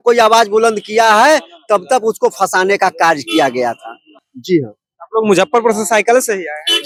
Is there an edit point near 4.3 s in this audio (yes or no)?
no